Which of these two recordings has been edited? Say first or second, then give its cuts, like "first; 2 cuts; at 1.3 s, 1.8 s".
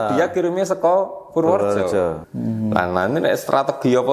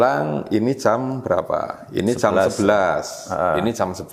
first; 1 cut; at 2.3 s